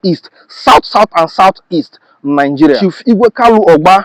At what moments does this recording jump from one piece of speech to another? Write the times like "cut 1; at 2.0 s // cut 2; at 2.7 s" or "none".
cut 1; at 2.8 s